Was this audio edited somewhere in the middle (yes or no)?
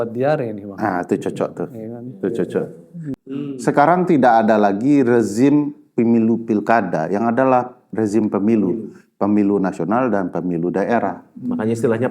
yes